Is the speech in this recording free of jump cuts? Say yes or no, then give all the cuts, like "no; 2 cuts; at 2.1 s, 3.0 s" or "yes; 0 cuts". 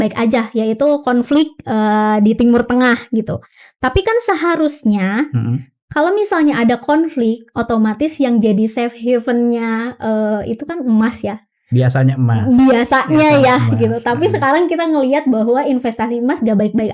yes; 0 cuts